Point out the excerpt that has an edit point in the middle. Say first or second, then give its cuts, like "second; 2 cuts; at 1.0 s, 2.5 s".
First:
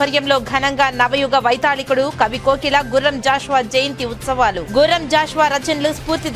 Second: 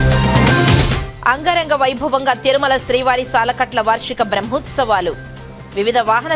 second; 1 cut; at 1.0 s